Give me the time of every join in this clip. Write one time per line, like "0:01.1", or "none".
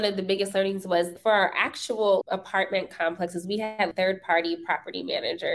0:01.1
0:02.2
0:03.9